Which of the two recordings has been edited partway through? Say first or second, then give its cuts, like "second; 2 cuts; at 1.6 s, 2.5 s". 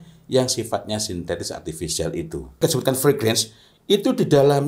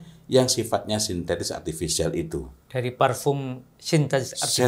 first; 1 cut; at 2.6 s